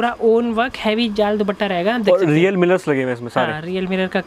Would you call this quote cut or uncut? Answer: uncut